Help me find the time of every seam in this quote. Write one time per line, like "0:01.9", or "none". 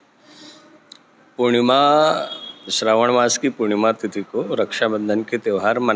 none